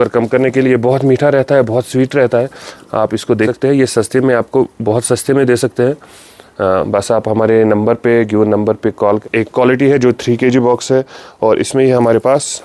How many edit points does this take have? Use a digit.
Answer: 2